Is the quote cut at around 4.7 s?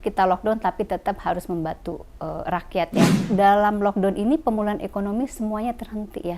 no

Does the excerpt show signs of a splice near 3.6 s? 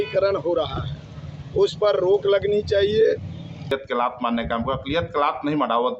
yes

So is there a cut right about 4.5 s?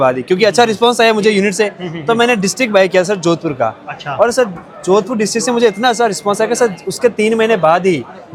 no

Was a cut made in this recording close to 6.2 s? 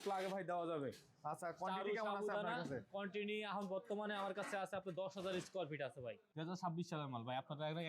yes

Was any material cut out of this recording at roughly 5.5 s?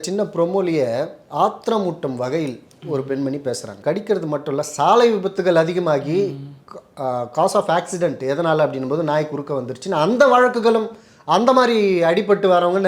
no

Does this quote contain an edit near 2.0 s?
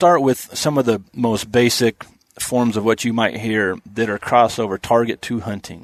no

